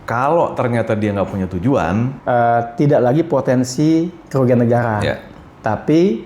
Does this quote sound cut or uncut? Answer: cut